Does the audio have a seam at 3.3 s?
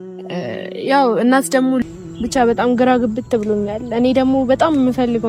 no; 1 cut; at 1.8 s

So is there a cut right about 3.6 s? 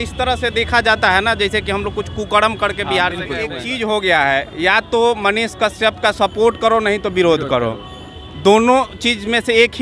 yes; 1 cut; at 3.6 s

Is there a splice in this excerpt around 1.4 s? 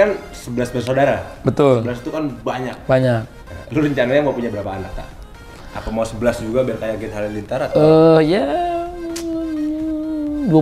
no; 0 cuts

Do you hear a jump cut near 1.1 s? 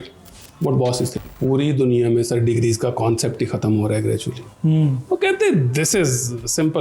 yes; 1 cut; at 1.1 s

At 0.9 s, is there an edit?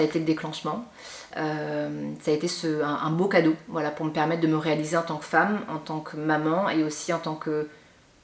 no; 0 cuts

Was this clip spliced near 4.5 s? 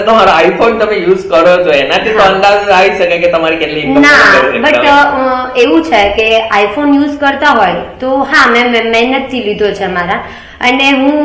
no; 0 cuts

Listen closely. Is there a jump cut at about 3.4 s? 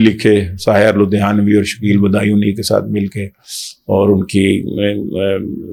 no; 0 cuts

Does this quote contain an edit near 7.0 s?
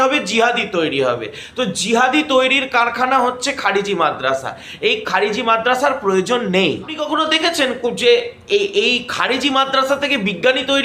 yes; 1 cut; at 7.0 s

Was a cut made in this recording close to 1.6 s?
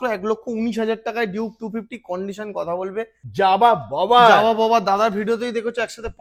no; 1 cut; at 3.2 s

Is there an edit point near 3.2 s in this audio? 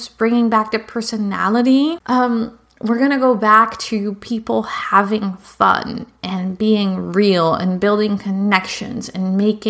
no; 1 cut; at 2.0 s

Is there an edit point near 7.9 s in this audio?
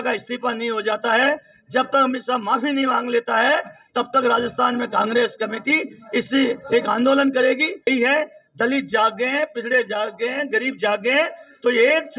yes; 1 cut; at 7.9 s

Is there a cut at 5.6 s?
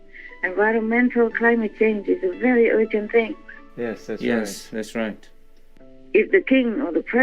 yes; 1 cut; at 5.6 s

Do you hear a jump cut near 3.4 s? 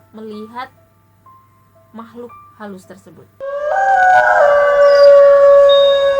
yes; 1 cut; at 3.4 s

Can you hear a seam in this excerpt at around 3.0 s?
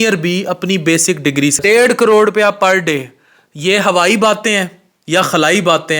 no; 1 cut; at 1.6 s

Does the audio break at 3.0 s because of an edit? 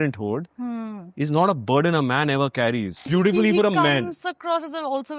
yes; 1 cut; at 3.0 s

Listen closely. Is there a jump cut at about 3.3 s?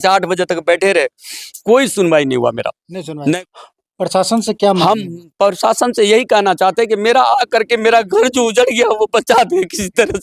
yes; 1 cut; at 3.3 s

